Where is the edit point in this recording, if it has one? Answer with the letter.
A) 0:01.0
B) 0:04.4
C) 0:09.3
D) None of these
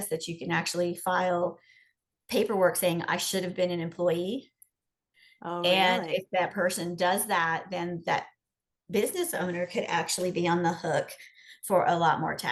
D